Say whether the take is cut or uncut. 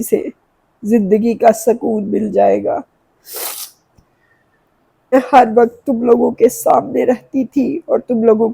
cut